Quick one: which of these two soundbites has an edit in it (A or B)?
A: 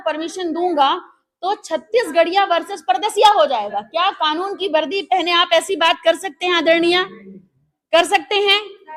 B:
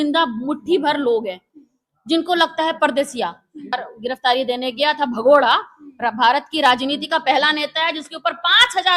B